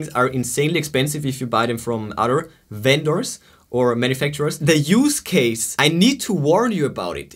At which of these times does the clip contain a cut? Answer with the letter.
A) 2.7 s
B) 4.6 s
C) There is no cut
B